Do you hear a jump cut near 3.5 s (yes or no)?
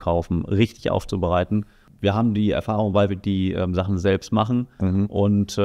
no